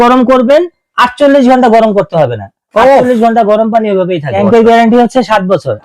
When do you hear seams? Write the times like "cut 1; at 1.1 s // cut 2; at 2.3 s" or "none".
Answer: cut 1; at 4.3 s